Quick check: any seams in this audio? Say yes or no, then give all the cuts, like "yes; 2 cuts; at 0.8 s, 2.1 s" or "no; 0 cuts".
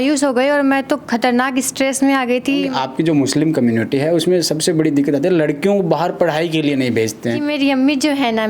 yes; 2 cuts; at 2.7 s, 7.5 s